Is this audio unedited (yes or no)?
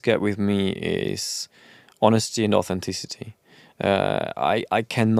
yes